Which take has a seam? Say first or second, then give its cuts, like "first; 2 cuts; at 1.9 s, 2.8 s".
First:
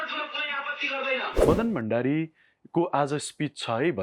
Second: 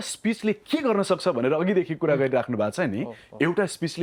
first; 1 cut; at 1.4 s